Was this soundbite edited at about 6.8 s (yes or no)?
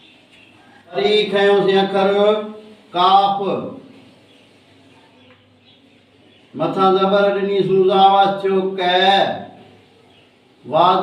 no